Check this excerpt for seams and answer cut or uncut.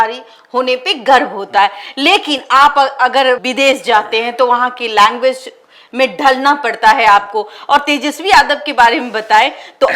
uncut